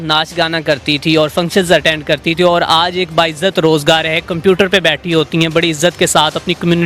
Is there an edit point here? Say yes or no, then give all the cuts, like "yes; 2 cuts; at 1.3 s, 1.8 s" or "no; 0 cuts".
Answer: no; 0 cuts